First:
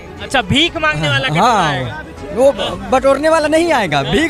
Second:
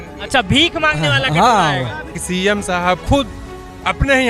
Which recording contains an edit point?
second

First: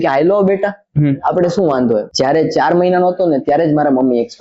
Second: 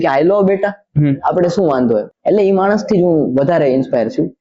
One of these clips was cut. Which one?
first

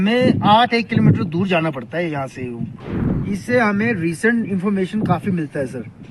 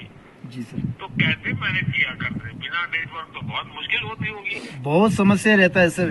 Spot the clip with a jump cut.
first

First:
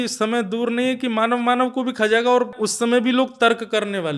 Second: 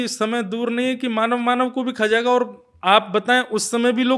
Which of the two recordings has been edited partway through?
first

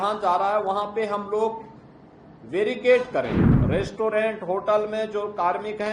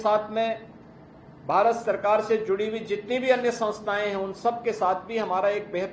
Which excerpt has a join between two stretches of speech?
first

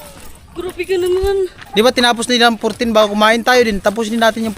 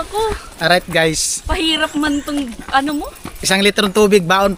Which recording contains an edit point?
first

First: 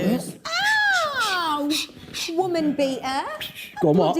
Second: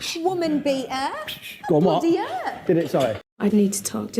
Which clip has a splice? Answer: second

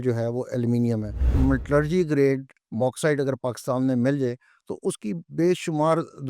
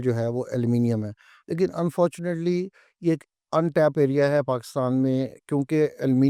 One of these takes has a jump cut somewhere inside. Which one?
first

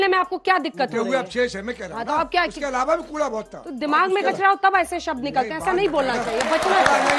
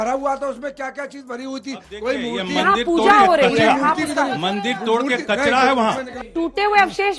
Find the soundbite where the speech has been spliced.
second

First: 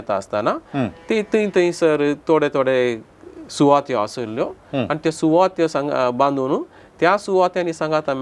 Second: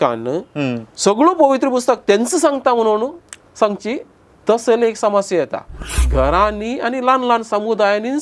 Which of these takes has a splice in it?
second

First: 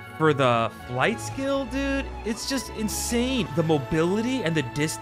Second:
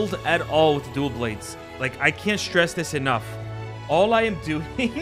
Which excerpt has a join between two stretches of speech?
first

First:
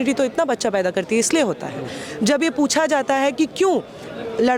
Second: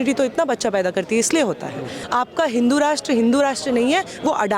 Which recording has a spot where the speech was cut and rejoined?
second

